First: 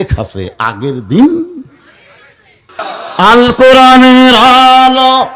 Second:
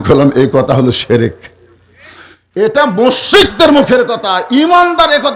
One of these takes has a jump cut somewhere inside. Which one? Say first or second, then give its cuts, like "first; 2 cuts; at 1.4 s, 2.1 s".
first; 1 cut; at 3.0 s